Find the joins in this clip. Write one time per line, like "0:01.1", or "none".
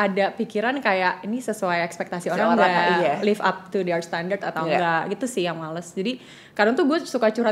none